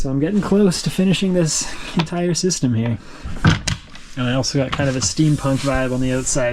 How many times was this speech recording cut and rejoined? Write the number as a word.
one